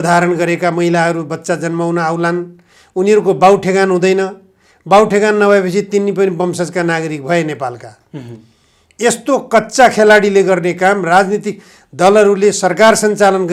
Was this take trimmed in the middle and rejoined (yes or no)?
no